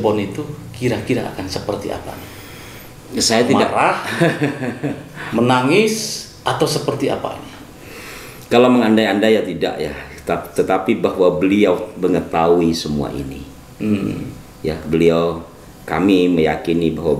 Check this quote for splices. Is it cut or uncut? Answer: uncut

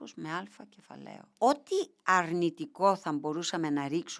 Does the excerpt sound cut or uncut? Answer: cut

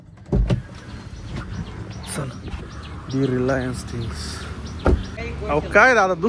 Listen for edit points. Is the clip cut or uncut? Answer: cut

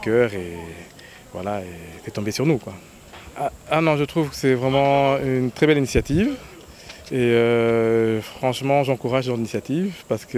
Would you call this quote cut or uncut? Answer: uncut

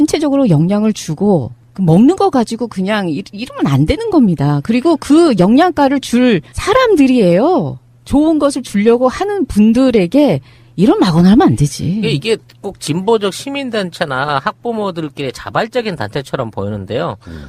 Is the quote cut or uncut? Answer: cut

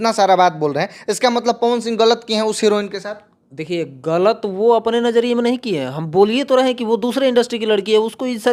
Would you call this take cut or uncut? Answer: uncut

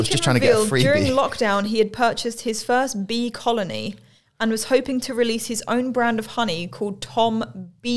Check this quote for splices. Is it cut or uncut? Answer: uncut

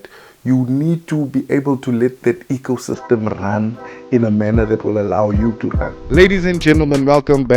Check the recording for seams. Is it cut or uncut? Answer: cut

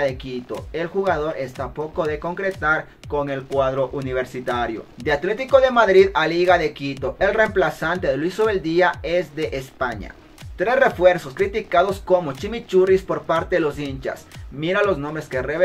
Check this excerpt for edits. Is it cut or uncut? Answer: cut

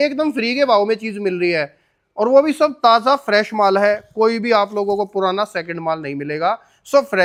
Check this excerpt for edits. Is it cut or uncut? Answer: uncut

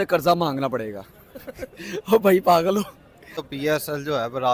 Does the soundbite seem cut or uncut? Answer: cut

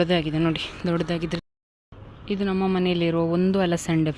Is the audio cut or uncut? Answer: cut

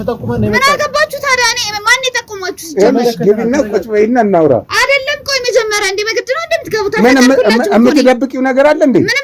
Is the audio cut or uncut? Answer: uncut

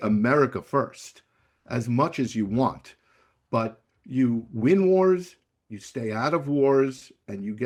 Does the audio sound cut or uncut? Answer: uncut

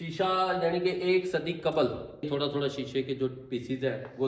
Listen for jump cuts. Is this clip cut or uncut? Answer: cut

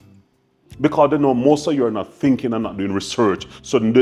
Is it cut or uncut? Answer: uncut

